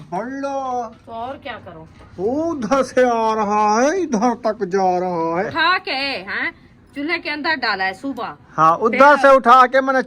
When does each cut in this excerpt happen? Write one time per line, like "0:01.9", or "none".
0:05.5
0:08.4